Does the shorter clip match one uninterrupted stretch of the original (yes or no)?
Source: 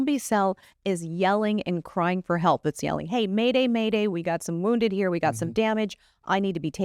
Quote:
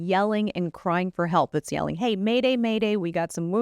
yes